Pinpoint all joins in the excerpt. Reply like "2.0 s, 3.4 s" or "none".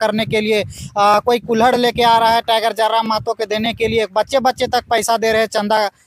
none